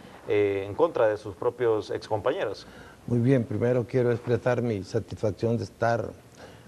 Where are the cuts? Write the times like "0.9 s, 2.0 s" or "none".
none